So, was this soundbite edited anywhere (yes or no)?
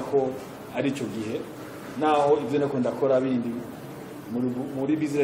no